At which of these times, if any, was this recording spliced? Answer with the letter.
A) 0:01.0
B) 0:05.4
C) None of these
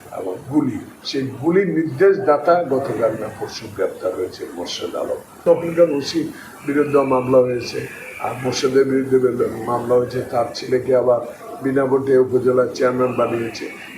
B